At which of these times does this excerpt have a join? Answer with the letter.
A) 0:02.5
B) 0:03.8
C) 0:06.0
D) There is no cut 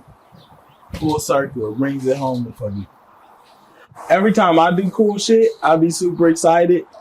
B